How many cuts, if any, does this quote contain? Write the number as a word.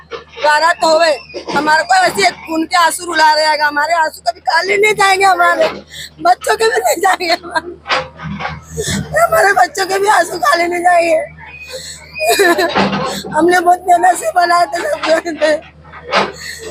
zero